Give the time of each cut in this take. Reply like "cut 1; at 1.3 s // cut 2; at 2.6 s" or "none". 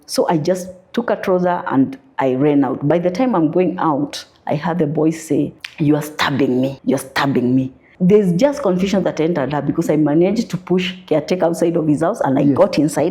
cut 1; at 5.6 s // cut 2; at 6.8 s // cut 3; at 7.8 s